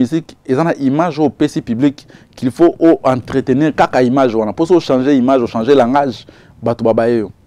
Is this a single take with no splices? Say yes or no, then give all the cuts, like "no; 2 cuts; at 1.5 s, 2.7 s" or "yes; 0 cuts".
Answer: yes; 0 cuts